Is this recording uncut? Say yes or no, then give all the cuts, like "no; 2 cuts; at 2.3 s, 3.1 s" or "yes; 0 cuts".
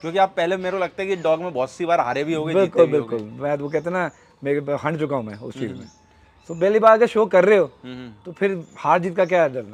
yes; 0 cuts